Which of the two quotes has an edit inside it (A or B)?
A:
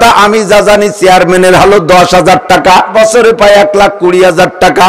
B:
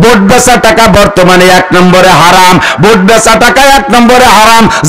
A